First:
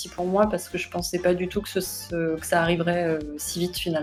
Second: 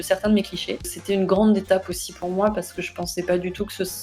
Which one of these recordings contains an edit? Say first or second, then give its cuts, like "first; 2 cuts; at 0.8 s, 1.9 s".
second; 1 cut; at 0.9 s